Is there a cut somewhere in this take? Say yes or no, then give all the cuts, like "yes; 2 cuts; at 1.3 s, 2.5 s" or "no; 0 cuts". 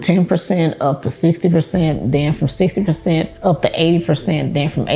yes; 1 cut; at 3.3 s